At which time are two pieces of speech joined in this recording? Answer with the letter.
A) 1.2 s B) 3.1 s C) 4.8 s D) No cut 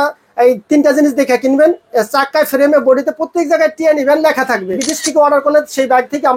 C